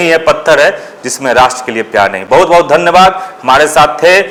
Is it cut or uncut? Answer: uncut